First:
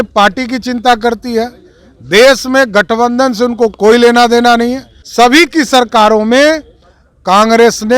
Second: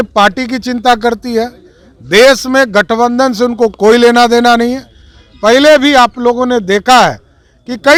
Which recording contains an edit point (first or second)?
first